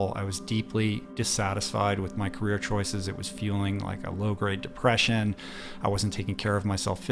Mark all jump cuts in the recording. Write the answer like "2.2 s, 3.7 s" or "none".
1.1 s